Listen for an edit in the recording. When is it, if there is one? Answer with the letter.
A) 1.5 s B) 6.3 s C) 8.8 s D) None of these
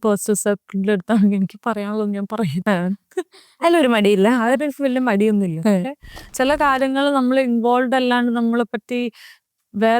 B